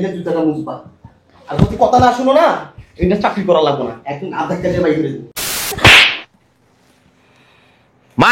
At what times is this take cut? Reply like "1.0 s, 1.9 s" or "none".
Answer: 5.8 s